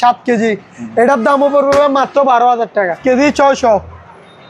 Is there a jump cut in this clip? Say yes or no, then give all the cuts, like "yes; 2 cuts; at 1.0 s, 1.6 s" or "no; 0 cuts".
yes; 1 cut; at 3.0 s